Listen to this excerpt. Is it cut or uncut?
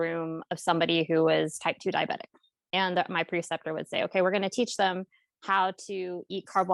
uncut